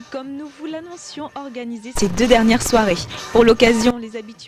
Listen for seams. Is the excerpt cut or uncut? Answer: uncut